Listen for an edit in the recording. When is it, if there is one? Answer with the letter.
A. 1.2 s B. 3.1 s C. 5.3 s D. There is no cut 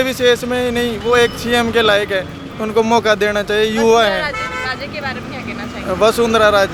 D